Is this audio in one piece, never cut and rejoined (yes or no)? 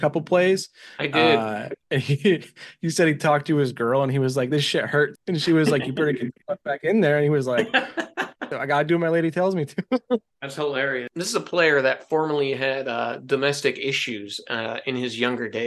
no